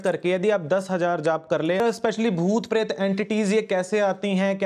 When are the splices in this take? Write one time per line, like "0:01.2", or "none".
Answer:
0:01.8